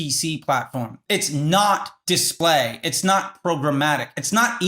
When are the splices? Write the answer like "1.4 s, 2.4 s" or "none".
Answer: 2.3 s